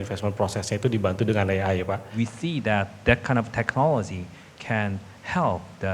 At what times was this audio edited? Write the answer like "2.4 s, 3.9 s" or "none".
2.1 s